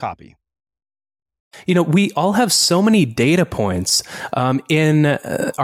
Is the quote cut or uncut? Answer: cut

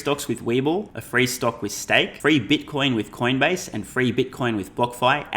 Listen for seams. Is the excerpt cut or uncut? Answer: cut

